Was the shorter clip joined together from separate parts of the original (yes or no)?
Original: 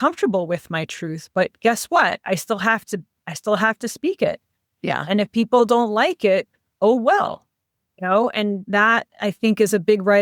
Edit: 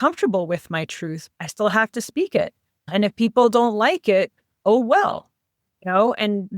yes